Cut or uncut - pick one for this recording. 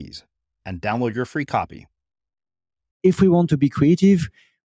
cut